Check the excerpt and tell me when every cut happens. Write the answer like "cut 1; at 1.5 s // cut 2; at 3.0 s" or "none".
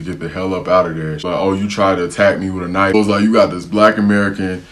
cut 1; at 1.2 s // cut 2; at 2.9 s